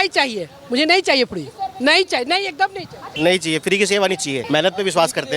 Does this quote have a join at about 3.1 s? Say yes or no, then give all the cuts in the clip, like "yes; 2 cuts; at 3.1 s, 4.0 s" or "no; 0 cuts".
yes; 2 cuts; at 3.1 s, 4.4 s